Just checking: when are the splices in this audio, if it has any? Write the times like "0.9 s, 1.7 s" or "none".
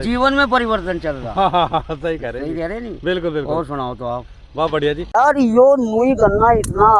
5.4 s